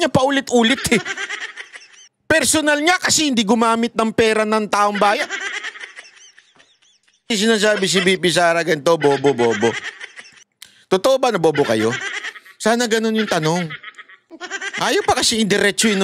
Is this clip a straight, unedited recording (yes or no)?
no